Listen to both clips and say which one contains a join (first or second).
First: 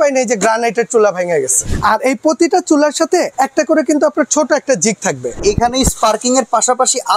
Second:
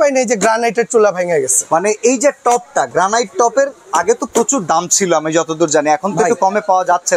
first